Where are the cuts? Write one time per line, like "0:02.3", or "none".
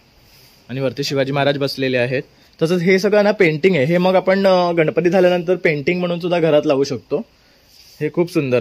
0:02.4